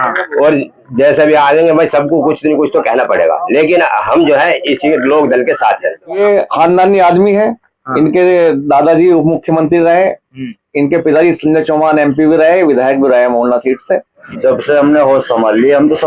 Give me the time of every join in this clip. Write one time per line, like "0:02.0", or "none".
0:06.2
0:14.2